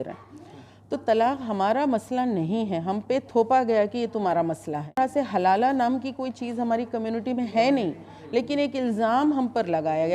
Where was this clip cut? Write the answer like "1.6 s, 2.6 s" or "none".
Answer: 5.0 s